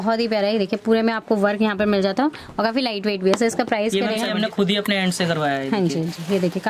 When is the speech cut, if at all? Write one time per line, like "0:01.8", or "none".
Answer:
0:04.3